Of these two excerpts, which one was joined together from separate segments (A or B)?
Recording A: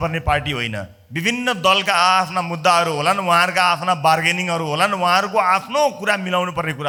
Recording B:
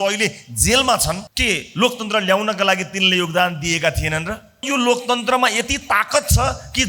B